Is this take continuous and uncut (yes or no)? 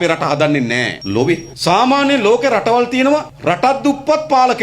no